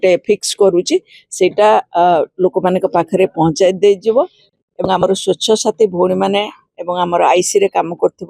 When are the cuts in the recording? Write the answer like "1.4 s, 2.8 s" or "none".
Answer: none